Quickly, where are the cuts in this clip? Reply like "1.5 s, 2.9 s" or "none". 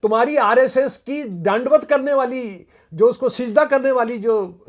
none